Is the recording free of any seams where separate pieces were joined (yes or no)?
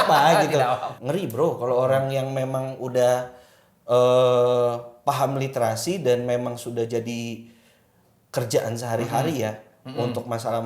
no